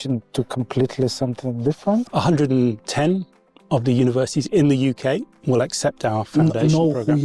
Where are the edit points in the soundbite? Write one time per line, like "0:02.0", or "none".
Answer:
0:02.1